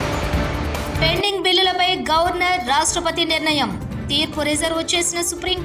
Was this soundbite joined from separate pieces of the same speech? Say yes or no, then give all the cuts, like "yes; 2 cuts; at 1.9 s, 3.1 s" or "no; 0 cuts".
yes; 1 cut; at 0.9 s